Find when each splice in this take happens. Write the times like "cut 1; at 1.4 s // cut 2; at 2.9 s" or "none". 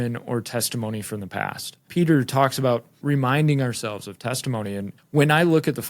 cut 1; at 1.8 s // cut 2; at 3.0 s // cut 3; at 4.9 s